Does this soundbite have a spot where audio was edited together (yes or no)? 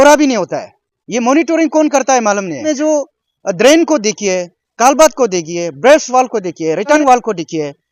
yes